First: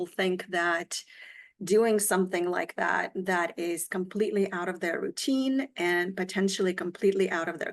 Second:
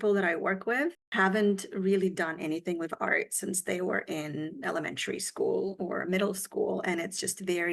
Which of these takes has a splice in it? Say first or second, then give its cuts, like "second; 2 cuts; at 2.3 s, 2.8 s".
second; 1 cut; at 1.0 s